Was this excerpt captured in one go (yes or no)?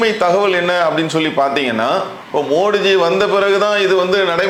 yes